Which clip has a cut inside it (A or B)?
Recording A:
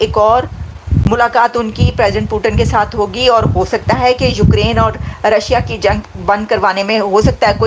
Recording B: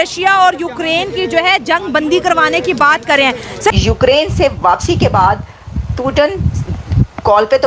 B